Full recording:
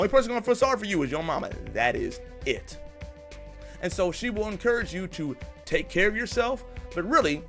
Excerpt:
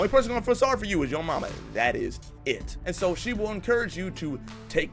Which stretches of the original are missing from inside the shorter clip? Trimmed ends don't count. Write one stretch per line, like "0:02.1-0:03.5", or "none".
0:02.7-0:03.7